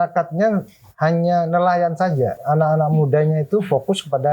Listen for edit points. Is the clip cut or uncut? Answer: cut